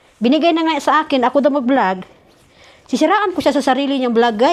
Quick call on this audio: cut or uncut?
uncut